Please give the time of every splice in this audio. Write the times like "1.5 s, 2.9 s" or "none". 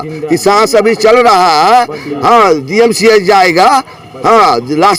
none